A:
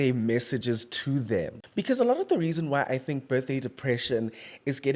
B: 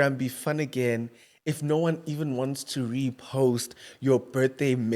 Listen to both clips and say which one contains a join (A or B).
A